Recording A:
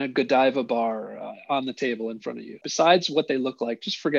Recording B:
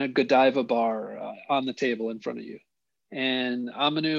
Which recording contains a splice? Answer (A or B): A